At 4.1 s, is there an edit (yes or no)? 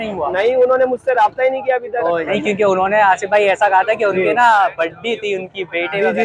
no